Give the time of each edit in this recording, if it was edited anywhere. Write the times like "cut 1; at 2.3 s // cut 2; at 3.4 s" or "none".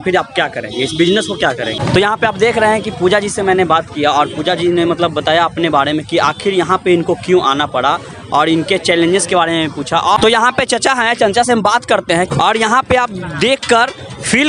cut 1; at 1.7 s // cut 2; at 10.2 s // cut 3; at 12.3 s